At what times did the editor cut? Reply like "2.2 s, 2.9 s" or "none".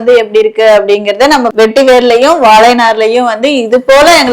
1.5 s